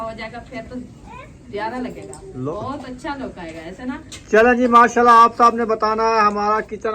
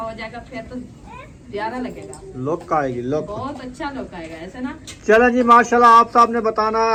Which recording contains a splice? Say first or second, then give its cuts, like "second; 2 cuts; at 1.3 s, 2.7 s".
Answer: first; 1 cut; at 2.5 s